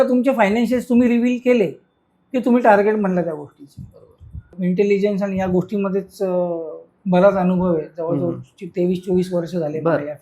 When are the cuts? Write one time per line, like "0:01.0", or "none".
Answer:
0:04.5